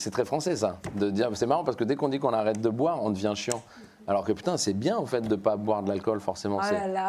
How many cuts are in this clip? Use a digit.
0